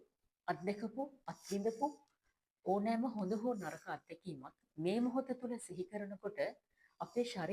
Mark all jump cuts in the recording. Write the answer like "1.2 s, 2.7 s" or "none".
4.6 s